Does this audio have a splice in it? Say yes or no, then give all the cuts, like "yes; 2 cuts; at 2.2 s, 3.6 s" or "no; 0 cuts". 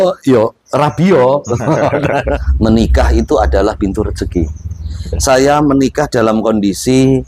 yes; 1 cut; at 2.5 s